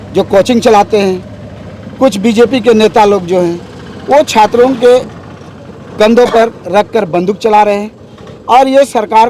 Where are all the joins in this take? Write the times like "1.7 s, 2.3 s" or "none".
none